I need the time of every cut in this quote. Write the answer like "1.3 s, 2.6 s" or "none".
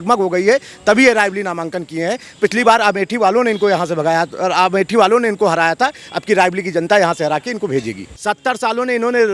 8.0 s